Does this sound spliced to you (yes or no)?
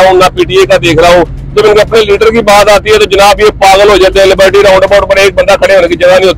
no